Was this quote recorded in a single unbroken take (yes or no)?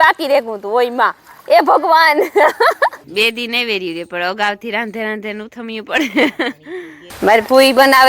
no